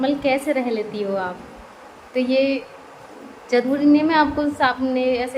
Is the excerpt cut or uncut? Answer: uncut